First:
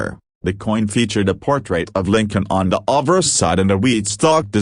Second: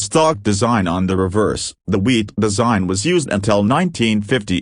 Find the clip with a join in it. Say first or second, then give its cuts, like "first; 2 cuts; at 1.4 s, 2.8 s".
first; 2 cuts; at 1.9 s, 2.7 s